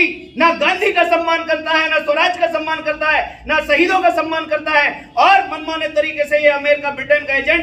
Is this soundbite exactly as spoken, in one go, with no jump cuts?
yes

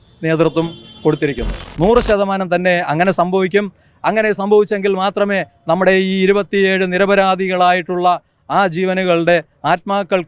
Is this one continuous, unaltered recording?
no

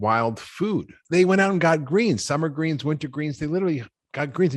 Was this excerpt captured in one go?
no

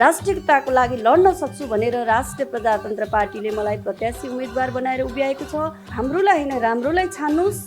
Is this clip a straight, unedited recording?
no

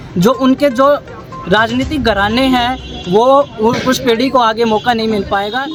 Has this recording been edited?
no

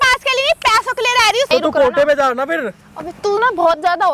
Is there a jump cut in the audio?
yes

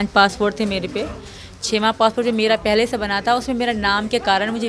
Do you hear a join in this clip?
no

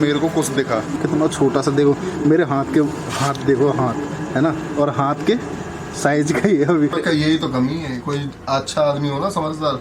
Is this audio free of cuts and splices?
no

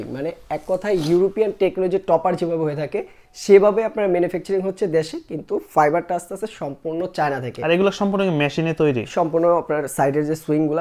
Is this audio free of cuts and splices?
yes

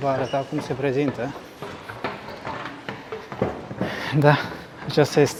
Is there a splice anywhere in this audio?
no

